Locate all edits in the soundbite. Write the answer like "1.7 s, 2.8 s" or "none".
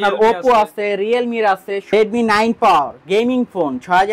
1.9 s